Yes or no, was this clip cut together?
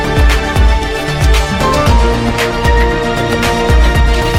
no